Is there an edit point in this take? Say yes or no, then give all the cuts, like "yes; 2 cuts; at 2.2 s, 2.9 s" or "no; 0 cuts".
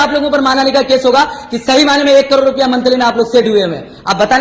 no; 0 cuts